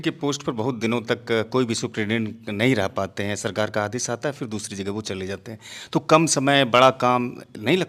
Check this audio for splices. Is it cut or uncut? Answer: uncut